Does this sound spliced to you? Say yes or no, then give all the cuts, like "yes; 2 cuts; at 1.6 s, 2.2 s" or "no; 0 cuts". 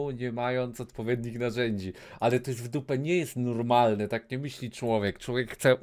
no; 0 cuts